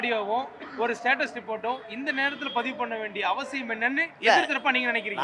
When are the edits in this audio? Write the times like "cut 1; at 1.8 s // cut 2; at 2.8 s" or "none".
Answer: none